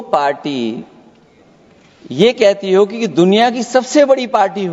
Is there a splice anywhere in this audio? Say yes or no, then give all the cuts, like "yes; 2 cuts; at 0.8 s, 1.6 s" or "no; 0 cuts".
no; 0 cuts